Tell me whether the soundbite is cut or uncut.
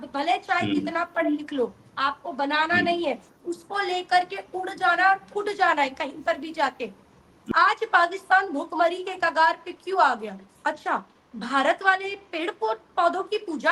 cut